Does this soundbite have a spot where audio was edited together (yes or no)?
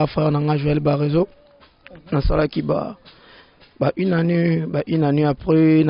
no